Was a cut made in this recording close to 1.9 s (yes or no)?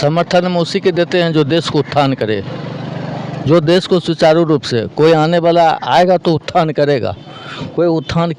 no